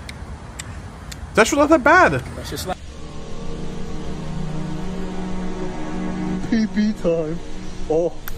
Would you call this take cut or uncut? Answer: cut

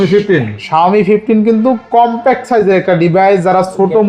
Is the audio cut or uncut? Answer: uncut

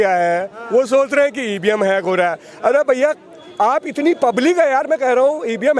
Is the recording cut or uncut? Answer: uncut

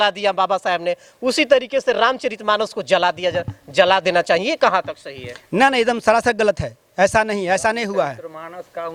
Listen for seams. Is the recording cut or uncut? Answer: uncut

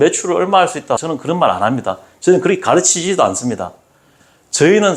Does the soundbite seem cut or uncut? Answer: cut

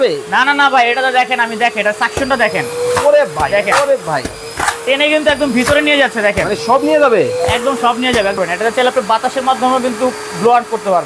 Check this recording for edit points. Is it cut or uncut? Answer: cut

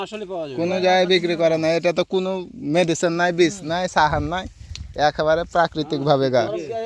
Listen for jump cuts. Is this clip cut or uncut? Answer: uncut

